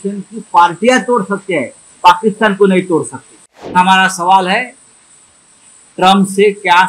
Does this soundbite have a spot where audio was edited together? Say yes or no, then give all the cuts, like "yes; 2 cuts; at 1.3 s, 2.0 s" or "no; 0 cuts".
yes; 1 cut; at 3.7 s